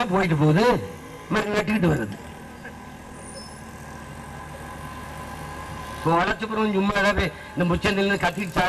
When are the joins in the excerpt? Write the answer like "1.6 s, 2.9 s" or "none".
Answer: none